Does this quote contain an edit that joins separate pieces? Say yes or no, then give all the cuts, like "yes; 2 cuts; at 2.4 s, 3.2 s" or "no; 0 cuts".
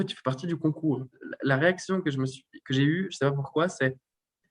yes; 1 cut; at 1.2 s